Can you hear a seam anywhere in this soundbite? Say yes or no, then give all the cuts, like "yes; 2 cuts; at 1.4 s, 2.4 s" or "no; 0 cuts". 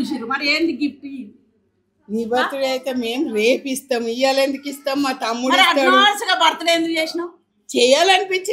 no; 0 cuts